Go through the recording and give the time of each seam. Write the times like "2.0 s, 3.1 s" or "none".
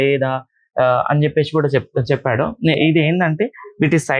none